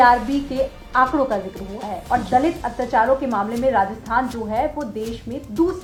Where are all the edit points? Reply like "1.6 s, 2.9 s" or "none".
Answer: none